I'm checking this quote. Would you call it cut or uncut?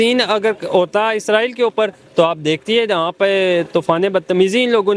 uncut